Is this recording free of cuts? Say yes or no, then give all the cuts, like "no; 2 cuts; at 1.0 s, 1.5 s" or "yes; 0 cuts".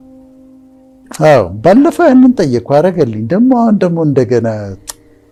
yes; 0 cuts